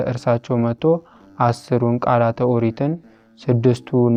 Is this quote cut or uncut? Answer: uncut